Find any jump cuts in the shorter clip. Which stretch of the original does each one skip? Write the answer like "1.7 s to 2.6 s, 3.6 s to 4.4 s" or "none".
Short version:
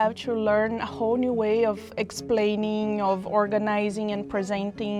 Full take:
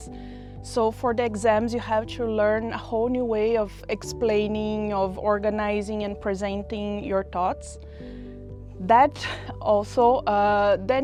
none